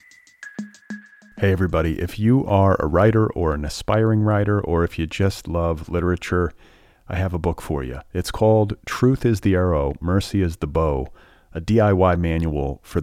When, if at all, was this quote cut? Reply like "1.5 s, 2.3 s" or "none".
1.0 s